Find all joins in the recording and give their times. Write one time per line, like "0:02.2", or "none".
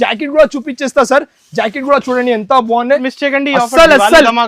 0:03.1

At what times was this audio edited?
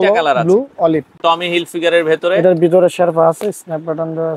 0:01.1

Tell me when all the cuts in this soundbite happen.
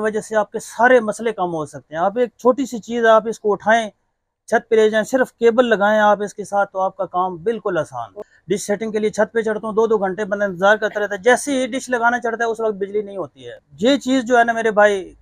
0:08.2
0:13.6

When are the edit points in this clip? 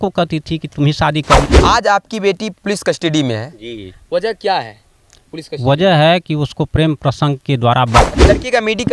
0:01.4
0:08.0

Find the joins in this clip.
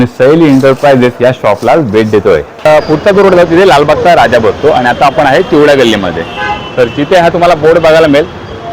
0:02.7

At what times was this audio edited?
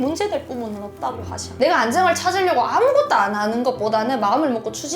0:01.5

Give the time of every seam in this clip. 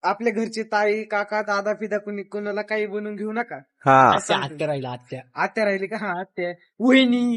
none

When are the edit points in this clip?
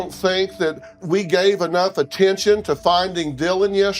0:01.0

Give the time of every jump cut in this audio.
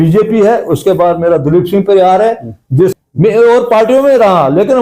0:02.9

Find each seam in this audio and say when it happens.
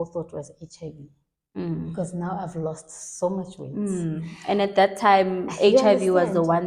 none

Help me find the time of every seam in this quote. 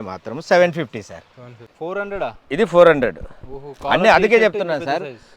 0:01.7

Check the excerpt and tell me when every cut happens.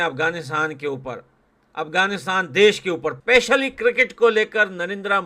0:03.1

